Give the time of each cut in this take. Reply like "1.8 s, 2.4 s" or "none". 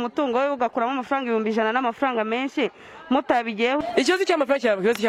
3.8 s